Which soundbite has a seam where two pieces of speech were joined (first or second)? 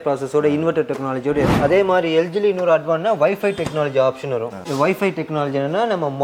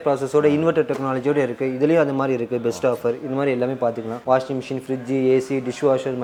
first